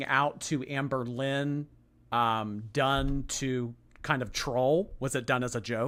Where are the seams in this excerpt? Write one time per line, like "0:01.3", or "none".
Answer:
none